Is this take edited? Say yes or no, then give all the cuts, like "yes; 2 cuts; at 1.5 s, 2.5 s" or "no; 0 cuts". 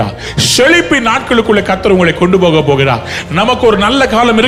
no; 0 cuts